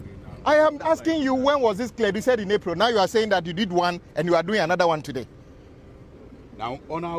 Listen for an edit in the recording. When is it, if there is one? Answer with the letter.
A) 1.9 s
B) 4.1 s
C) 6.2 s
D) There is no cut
C